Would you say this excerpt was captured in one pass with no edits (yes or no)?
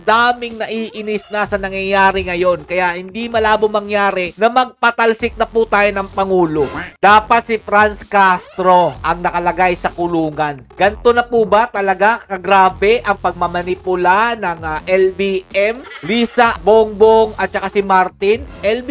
no